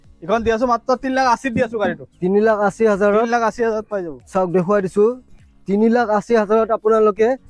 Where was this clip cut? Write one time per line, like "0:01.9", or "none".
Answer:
none